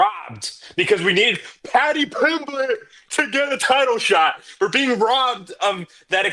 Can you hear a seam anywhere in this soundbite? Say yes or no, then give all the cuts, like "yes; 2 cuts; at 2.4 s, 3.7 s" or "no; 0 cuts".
no; 0 cuts